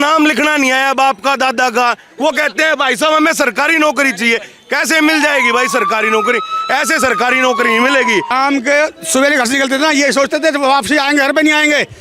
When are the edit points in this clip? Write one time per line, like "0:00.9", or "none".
0:08.3